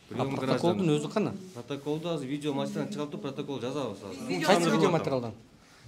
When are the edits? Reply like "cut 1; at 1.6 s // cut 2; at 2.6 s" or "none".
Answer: cut 1; at 4.1 s